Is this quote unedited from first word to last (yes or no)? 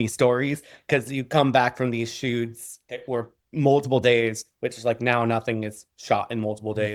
yes